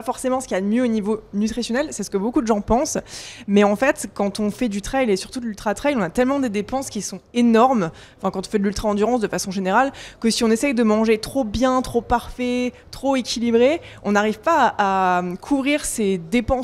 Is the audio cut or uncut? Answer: uncut